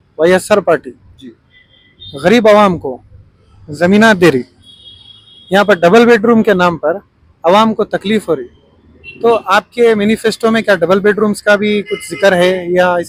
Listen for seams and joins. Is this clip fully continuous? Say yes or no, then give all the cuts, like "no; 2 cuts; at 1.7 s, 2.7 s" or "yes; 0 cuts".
yes; 0 cuts